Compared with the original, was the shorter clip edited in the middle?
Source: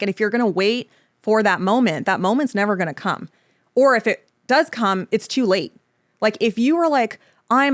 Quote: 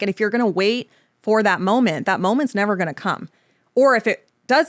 no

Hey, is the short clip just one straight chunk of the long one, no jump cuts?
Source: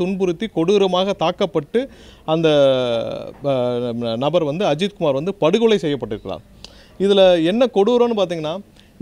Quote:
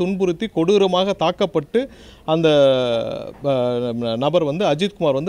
yes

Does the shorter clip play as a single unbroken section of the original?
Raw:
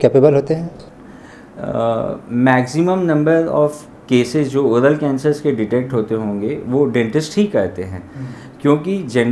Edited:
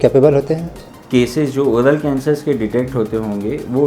no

